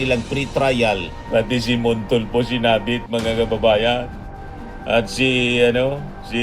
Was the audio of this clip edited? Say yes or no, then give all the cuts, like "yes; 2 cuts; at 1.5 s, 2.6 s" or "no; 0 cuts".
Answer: yes; 1 cut; at 1.1 s